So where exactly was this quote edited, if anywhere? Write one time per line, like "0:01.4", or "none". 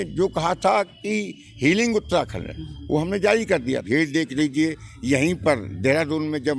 0:03.8